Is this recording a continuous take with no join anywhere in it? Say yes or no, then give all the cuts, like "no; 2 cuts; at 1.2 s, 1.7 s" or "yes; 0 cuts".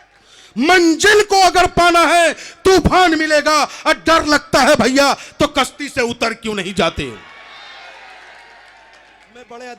yes; 0 cuts